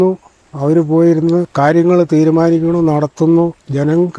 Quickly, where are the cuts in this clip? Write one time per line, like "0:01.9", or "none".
0:01.5